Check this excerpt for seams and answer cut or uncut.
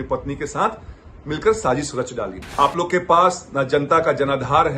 cut